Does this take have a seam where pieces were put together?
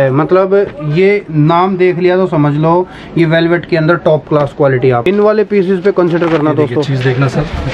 yes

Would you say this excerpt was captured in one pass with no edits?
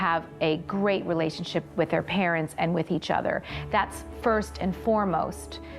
no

